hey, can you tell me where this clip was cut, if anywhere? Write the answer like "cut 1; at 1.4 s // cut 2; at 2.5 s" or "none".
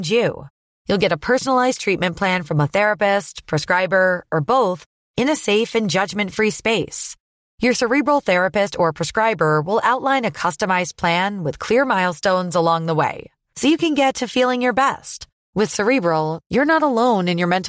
none